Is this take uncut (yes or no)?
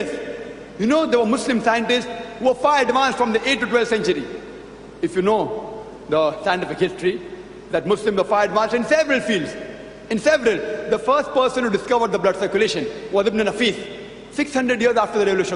yes